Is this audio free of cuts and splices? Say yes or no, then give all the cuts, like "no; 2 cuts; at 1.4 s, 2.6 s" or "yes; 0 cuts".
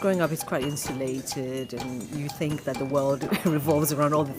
yes; 0 cuts